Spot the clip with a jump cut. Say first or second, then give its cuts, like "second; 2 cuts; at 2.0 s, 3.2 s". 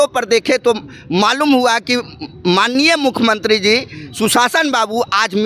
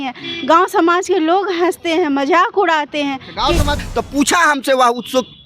second; 1 cut; at 3.8 s